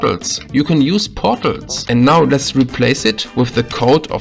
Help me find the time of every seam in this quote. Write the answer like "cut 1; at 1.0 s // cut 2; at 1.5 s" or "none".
cut 1; at 1.8 s